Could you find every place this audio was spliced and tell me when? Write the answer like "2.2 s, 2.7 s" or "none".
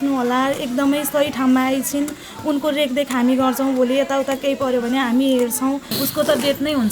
6.0 s